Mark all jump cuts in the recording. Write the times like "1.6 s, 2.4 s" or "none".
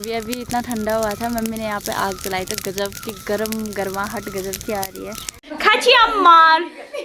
5.3 s